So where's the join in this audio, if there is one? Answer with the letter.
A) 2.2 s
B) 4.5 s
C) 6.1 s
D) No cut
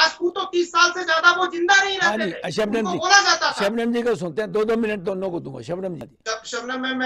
C